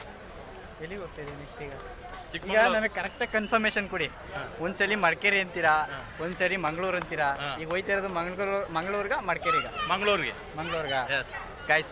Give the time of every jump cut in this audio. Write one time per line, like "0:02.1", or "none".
none